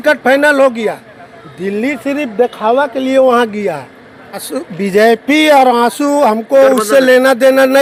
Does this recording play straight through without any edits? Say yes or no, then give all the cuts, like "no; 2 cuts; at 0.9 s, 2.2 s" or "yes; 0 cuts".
yes; 0 cuts